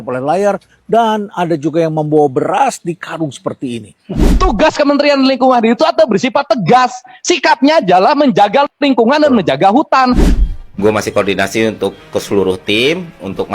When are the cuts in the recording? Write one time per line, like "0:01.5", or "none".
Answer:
0:04.3
0:10.3